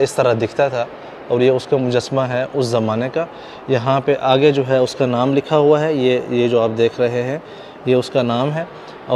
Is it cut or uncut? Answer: uncut